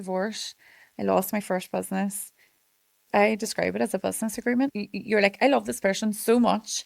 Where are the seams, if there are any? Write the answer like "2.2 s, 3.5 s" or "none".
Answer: 3.0 s, 4.7 s